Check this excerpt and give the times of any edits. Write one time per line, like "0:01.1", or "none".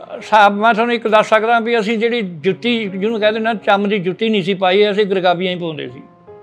none